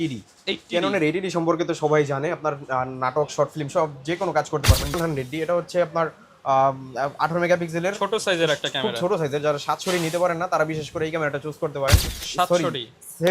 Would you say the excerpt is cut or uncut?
cut